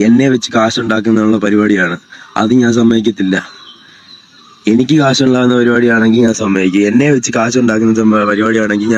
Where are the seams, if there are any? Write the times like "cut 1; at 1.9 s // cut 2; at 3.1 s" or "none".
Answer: none